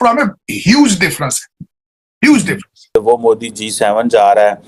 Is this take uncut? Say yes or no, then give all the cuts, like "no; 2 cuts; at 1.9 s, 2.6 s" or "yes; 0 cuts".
no; 1 cut; at 3.0 s